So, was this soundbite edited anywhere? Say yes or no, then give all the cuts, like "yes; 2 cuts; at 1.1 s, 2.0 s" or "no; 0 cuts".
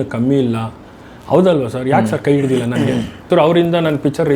yes; 1 cut; at 3.2 s